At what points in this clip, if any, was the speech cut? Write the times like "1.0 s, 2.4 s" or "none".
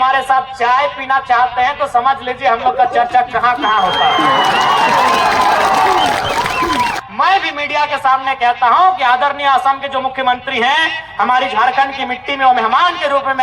none